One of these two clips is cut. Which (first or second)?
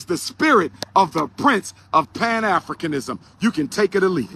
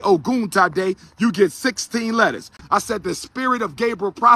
second